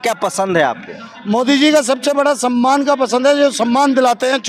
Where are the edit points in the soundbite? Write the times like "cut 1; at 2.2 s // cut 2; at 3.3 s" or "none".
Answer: none